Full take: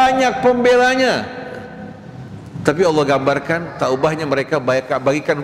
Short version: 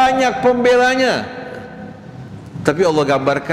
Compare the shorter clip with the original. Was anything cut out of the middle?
no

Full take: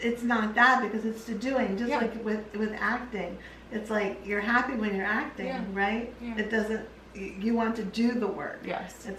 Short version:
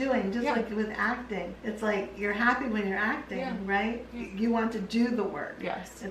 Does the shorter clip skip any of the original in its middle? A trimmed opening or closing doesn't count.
yes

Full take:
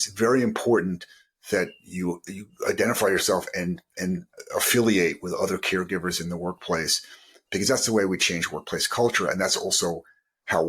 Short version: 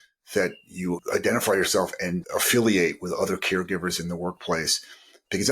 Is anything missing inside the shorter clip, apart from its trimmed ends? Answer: yes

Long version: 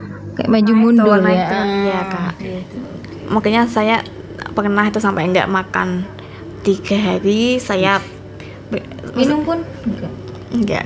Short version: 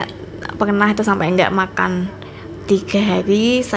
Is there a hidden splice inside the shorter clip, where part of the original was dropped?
no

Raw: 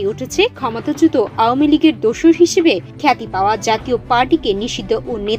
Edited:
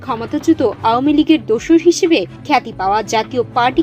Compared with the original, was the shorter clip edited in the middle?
no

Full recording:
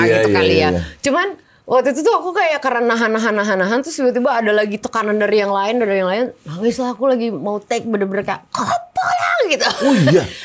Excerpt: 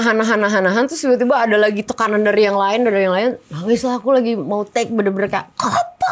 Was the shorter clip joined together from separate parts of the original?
no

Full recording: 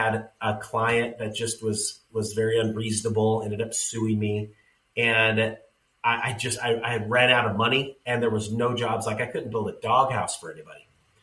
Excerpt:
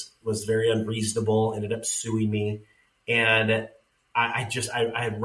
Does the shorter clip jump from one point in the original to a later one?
no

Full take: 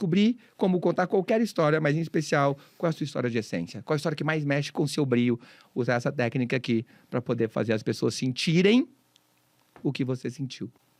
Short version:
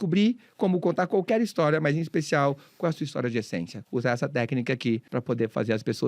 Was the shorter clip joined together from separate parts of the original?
yes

